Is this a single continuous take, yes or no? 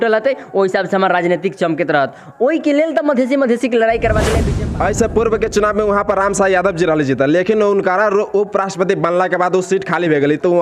no